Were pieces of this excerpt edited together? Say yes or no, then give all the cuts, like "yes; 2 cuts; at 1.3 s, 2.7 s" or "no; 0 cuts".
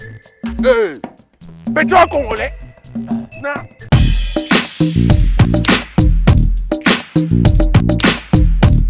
no; 0 cuts